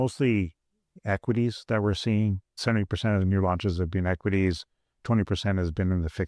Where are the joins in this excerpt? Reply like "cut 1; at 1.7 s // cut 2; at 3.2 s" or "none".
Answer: cut 1; at 2.6 s